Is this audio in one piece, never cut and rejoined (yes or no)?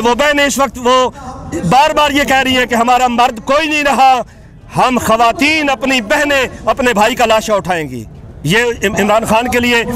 yes